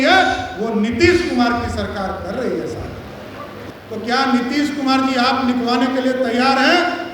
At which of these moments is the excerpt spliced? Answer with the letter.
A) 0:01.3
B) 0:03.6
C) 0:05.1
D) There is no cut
B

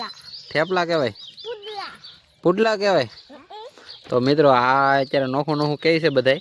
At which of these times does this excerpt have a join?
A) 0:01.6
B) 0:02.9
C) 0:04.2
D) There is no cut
D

